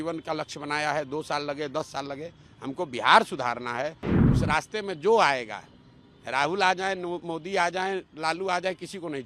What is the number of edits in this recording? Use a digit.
1